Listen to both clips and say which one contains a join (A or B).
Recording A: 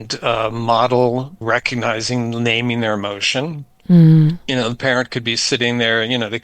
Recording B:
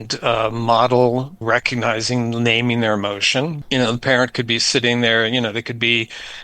B